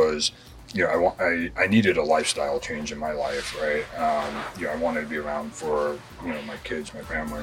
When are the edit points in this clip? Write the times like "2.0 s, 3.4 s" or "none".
none